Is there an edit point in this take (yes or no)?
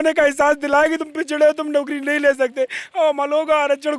no